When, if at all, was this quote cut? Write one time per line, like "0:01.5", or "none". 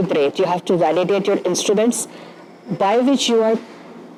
none